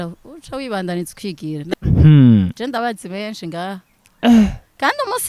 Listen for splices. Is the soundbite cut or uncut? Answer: cut